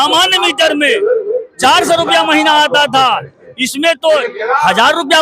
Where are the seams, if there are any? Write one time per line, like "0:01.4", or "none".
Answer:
none